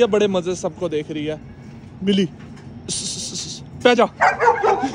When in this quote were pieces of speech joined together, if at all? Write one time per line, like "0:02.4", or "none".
none